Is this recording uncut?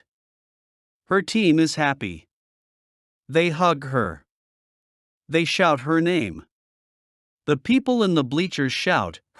no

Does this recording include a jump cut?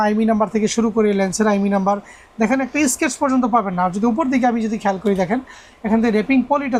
no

